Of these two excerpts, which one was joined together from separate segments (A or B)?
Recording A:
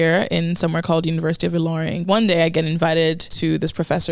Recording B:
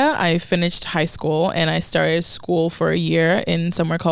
A